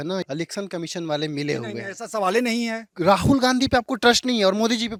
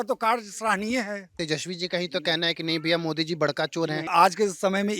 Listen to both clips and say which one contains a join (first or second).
second